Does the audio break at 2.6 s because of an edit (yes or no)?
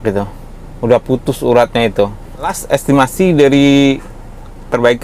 yes